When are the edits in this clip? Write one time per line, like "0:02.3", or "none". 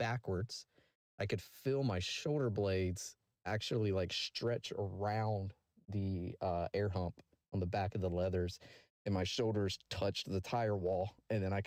none